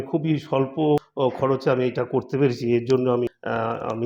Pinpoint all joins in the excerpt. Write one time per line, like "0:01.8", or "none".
0:01.1
0:03.3